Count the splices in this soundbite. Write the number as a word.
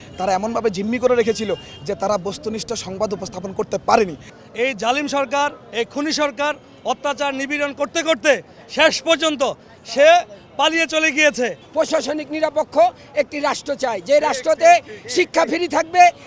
two